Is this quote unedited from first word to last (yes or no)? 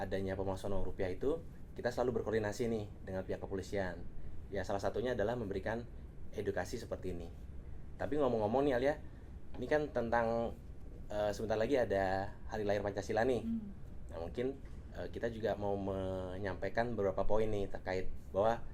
yes